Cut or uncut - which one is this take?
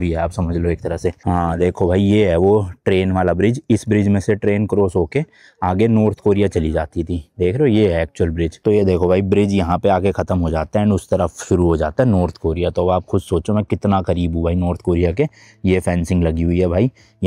cut